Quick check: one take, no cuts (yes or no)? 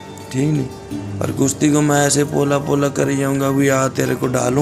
yes